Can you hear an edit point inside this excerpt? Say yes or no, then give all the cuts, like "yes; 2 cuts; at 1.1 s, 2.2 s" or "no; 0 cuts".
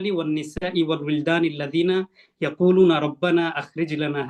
no; 0 cuts